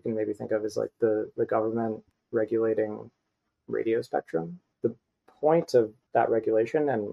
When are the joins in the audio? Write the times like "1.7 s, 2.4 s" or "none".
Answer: 4.6 s, 6.0 s